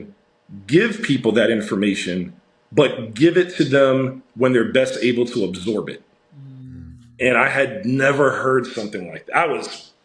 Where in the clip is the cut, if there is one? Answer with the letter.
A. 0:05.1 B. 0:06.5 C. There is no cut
C